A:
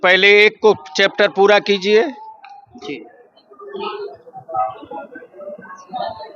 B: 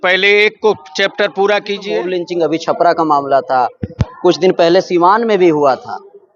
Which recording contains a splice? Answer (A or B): B